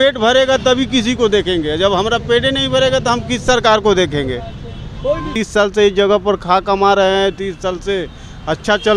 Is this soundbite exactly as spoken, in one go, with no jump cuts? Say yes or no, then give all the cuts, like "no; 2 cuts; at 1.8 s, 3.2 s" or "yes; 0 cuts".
no; 1 cut; at 5.3 s